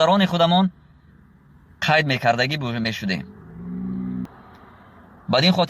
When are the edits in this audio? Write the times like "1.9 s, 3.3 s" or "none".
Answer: 4.2 s